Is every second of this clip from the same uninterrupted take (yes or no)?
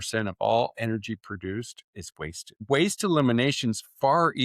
no